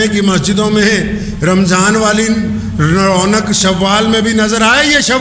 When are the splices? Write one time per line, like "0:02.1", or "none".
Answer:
none